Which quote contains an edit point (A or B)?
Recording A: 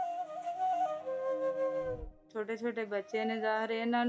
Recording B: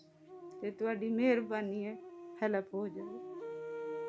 A